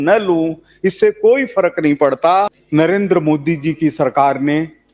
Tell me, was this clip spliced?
yes; 1 cut; at 2.6 s

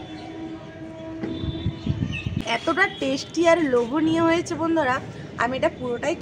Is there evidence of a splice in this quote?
yes; 1 cut; at 2.3 s

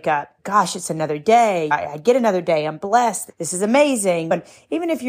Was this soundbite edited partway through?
no; 0 cuts

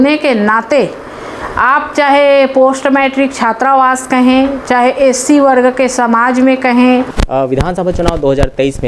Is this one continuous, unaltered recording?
no; 1 cut; at 7.1 s

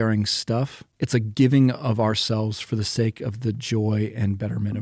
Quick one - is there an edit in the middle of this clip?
no; 0 cuts

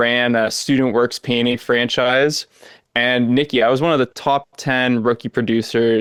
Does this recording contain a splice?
no; 0 cuts

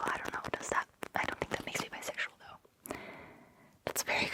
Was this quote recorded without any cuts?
yes; 0 cuts

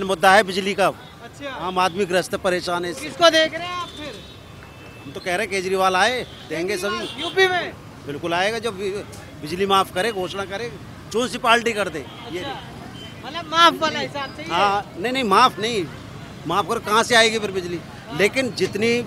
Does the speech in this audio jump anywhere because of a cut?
no; 0 cuts

